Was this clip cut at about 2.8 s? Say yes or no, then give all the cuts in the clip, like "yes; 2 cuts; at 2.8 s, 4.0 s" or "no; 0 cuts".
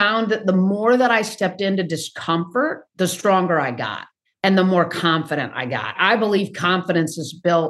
yes; 1 cut; at 2.8 s